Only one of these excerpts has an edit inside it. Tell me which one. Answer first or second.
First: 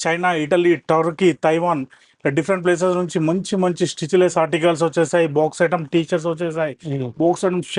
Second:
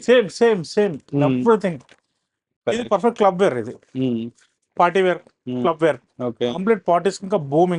second